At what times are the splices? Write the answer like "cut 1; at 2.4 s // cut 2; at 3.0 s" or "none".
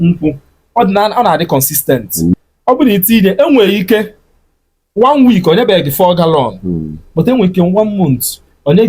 cut 1; at 2.3 s